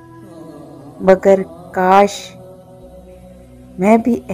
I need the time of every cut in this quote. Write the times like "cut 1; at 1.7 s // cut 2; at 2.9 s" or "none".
cut 1; at 0.9 s